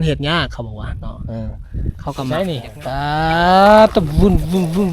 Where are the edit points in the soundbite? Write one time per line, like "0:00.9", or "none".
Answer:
0:02.3